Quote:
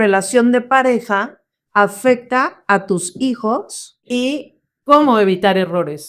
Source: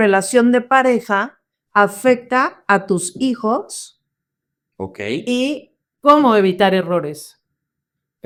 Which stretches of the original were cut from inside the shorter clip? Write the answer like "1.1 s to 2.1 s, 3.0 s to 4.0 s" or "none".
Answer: 4.1 s to 5.2 s